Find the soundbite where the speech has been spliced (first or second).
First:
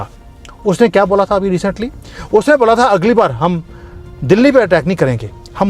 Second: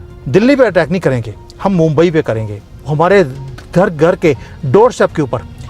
second